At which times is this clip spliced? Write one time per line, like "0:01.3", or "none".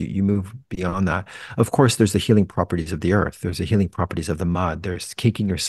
none